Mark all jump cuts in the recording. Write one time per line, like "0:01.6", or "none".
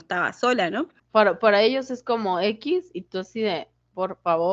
0:01.0